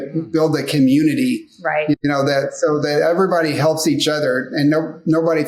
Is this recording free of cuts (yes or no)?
yes